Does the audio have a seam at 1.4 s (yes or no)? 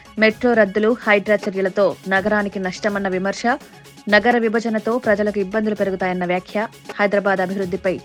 no